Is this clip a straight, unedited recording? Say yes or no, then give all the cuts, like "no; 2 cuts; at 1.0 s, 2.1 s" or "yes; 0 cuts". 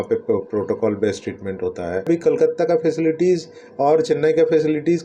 no; 1 cut; at 2.1 s